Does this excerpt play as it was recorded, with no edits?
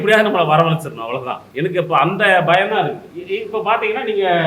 no; 2 cuts; at 1.4 s, 3.1 s

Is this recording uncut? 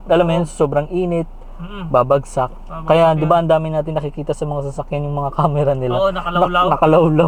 yes; 0 cuts

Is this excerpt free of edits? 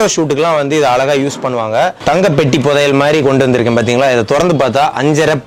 no; 1 cut; at 2.0 s

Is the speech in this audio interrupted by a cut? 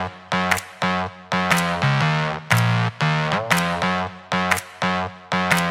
no; 0 cuts

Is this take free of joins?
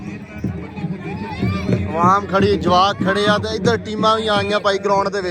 yes; 0 cuts

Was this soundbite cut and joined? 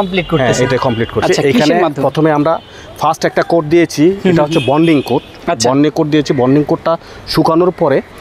no; 0 cuts

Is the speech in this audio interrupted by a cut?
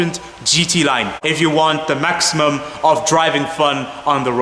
yes; 1 cut; at 1.2 s

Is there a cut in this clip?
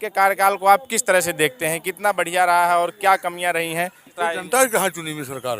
yes; 1 cut; at 4.1 s

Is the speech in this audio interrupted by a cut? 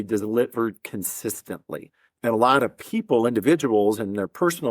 yes; 1 cut; at 2.1 s

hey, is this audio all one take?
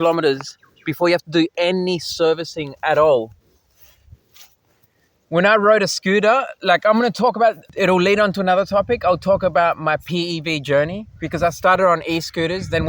no; 1 cut; at 7.6 s

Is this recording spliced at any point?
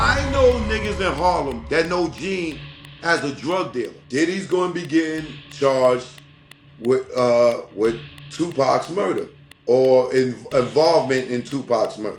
yes; 1 cut; at 4.0 s

